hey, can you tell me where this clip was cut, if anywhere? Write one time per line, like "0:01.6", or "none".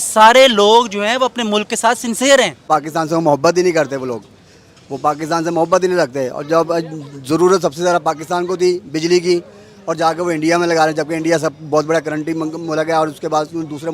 0:02.7